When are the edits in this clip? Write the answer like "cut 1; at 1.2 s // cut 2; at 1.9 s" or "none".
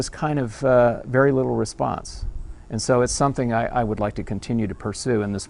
none